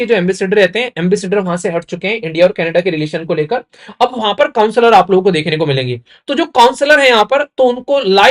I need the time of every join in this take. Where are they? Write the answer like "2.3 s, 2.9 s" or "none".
none